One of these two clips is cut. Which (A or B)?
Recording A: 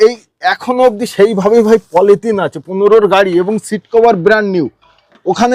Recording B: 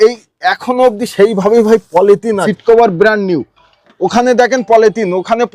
B